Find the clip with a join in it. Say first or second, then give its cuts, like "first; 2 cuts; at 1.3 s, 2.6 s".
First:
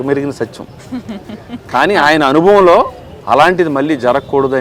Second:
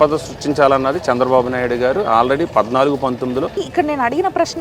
second; 1 cut; at 3.6 s